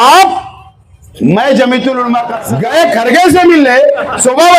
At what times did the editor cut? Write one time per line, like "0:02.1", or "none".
0:02.4